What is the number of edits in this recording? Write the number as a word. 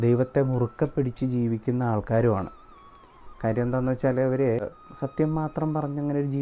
zero